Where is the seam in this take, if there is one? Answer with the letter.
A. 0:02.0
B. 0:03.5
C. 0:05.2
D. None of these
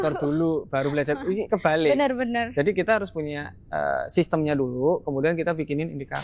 D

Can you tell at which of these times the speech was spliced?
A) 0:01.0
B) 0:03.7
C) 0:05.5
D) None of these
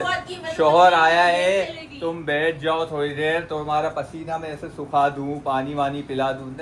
D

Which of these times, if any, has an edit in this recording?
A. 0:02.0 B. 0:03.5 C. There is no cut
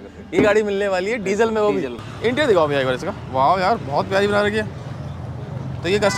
A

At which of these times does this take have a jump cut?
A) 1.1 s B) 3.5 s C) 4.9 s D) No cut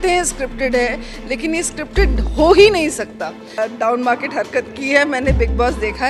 B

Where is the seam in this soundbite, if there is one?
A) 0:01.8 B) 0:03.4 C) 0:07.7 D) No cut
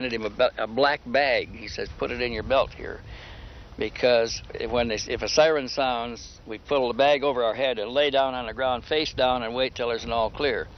D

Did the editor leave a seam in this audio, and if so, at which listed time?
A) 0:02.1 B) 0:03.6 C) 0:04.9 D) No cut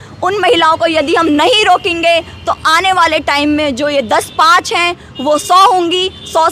D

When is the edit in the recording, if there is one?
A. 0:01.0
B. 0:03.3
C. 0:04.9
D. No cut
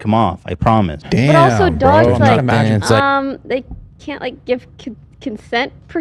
A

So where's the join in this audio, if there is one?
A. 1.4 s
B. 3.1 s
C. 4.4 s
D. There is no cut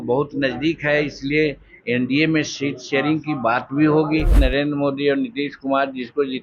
C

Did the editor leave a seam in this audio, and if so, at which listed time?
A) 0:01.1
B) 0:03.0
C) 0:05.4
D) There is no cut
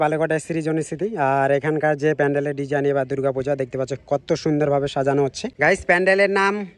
C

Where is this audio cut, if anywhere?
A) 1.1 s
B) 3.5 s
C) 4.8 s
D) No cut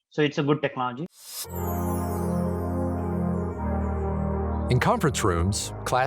A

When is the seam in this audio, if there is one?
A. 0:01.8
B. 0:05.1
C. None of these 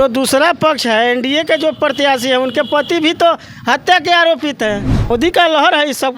B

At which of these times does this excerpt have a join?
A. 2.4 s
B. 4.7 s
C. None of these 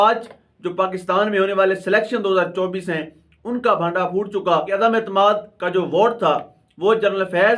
B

